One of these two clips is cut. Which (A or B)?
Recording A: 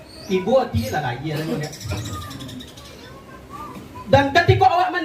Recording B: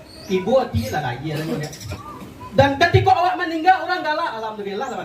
B